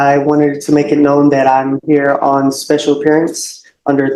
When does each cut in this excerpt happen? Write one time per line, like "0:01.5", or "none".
none